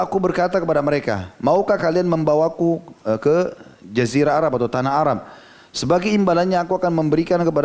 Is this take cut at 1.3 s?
no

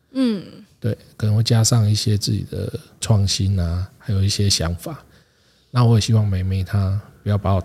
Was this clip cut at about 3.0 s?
yes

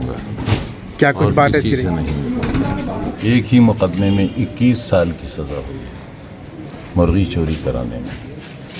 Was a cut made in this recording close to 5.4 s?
no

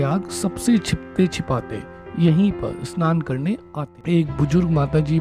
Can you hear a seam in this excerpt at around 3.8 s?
yes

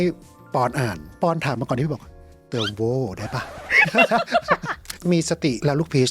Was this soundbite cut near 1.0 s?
yes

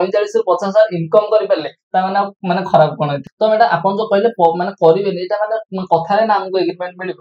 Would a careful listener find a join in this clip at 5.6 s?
no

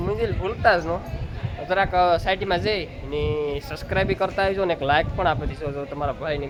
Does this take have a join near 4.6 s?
no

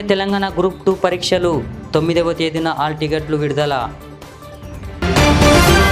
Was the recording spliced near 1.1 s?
no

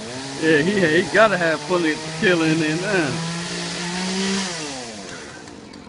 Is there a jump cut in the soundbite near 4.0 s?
yes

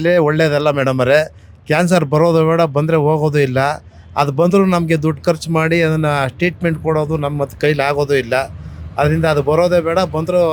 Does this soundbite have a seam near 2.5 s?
no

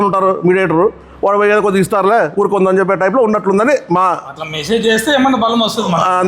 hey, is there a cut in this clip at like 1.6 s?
no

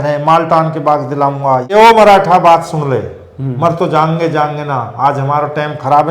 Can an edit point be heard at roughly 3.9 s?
no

